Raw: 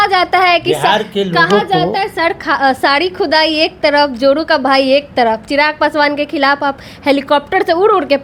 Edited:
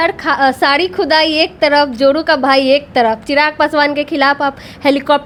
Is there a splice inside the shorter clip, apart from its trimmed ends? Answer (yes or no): no